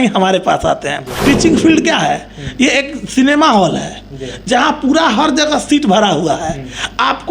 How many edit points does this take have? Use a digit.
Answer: 1